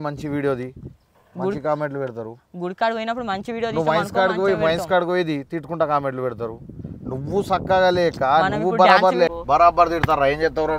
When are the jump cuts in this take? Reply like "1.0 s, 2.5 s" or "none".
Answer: 9.3 s

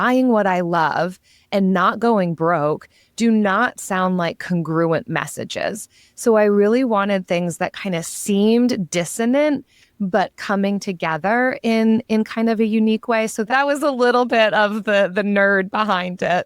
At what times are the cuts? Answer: 13.5 s

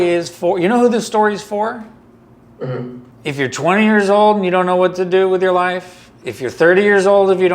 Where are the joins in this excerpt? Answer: 3.1 s

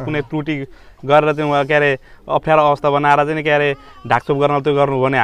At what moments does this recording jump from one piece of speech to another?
none

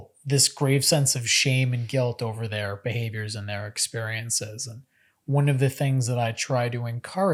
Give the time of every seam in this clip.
none

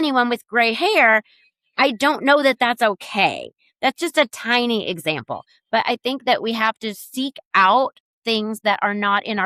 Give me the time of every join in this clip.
none

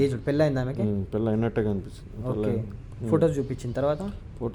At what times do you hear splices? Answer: none

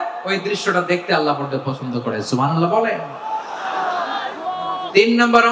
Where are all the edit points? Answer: none

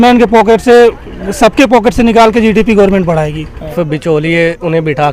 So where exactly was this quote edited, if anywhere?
3.7 s

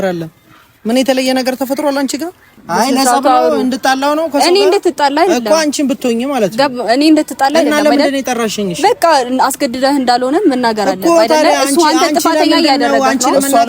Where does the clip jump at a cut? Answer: 2.6 s

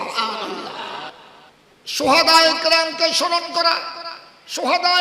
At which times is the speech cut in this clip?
1.1 s

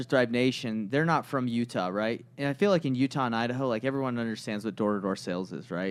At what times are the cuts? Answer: none

